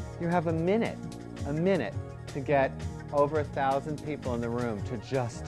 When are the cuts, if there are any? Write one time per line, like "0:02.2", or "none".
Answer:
none